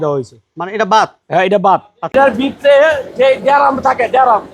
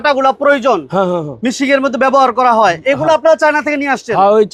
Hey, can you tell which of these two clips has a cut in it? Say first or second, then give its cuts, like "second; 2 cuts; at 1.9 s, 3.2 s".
first; 1 cut; at 2.1 s